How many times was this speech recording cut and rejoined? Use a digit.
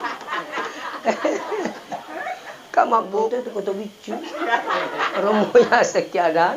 1